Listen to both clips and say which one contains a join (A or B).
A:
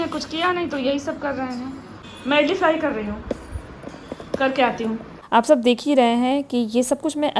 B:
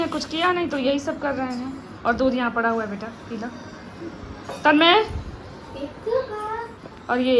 A